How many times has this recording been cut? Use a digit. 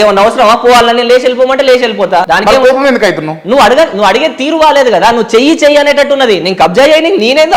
1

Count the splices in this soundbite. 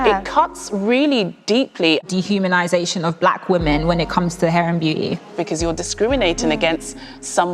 2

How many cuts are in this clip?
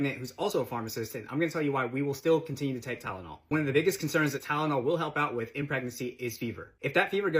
0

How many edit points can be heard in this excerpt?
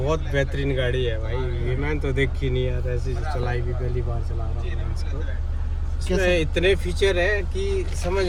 0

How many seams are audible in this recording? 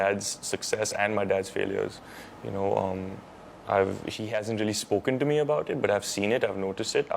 0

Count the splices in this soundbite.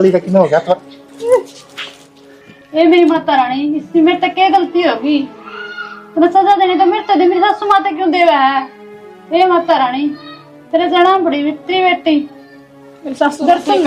0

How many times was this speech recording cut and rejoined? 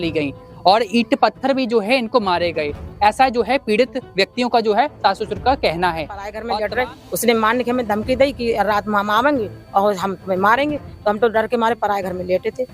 1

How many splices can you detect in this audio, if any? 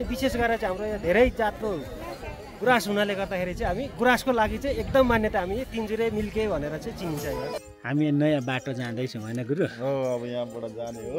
1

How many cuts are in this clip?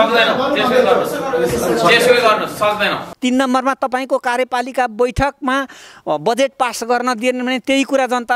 1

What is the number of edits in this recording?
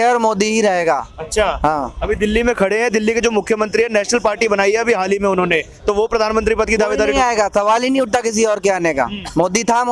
0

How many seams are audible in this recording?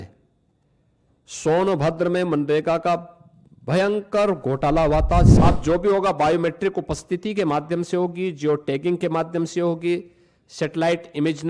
1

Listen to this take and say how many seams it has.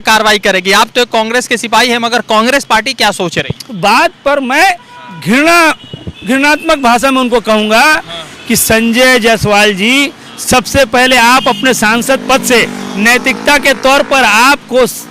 1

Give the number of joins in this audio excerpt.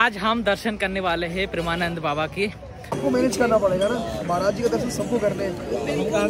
1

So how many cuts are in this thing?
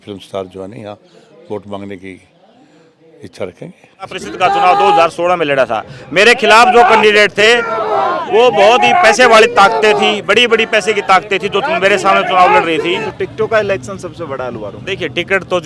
2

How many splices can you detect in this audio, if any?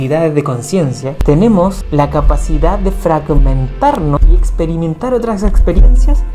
3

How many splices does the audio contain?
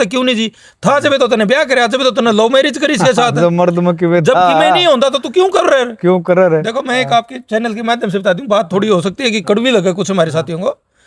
0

